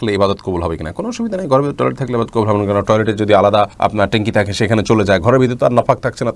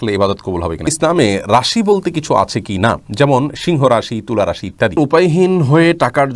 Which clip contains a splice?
second; 2 cuts; at 0.9 s, 5.0 s

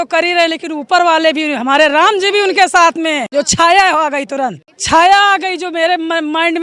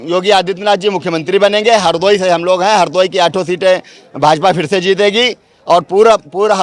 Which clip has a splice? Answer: first; 2 cuts; at 3.2 s, 4.7 s

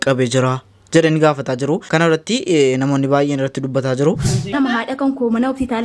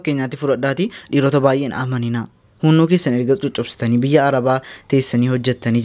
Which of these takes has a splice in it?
first; 2 cuts; at 1.8 s, 4.3 s

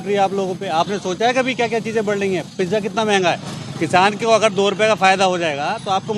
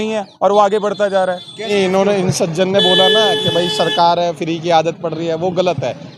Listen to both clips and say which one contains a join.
second; 1 cut; at 1.7 s

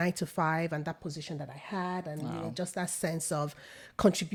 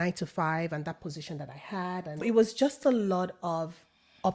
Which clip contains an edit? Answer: second; 1 cut; at 2.2 s

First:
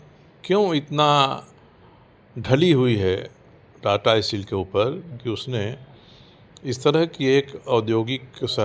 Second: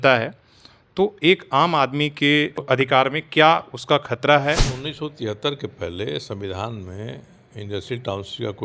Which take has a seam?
second; 2 cuts; at 2.6 s, 4.8 s

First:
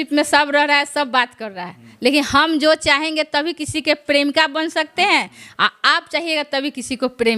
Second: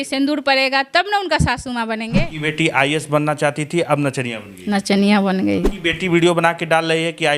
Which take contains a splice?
second; 2 cuts; at 2.1 s, 5.7 s

